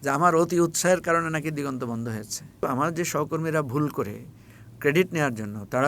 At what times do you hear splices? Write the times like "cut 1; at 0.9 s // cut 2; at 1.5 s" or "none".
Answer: cut 1; at 2.6 s